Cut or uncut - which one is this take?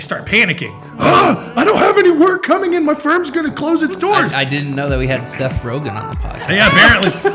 uncut